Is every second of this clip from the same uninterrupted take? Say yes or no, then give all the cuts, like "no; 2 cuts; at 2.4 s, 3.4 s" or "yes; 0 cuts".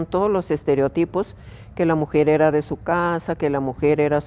yes; 0 cuts